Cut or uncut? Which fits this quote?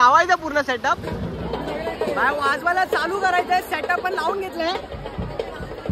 cut